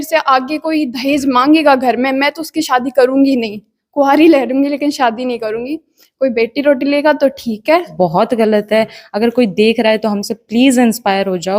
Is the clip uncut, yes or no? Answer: no